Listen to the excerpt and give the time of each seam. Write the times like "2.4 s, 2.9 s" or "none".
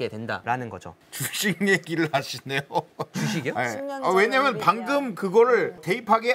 0.9 s